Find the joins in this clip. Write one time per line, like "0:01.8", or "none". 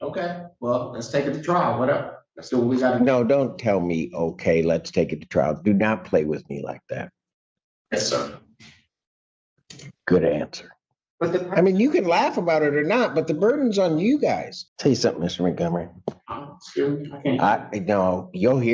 0:11.1
0:14.5